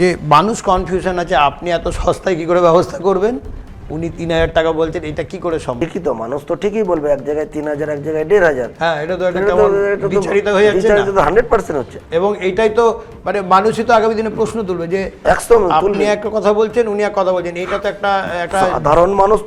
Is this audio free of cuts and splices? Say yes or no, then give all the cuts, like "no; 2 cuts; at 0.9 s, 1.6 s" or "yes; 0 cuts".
no; 1 cut; at 5.8 s